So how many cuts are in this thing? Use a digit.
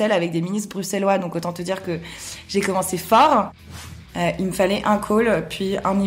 1